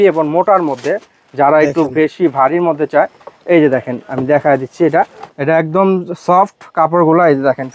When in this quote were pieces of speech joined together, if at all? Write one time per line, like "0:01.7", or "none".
0:05.2